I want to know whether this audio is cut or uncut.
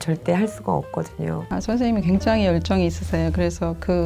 cut